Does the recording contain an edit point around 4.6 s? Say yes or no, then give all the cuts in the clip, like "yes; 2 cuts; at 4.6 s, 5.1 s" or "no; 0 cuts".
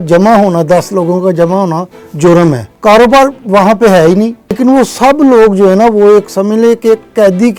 yes; 2 cuts; at 2.7 s, 4.6 s